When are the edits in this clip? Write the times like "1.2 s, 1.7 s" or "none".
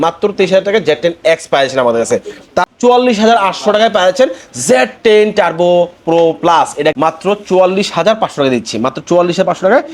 2.7 s, 6.9 s